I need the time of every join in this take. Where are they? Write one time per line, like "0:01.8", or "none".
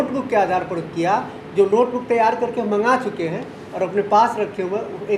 none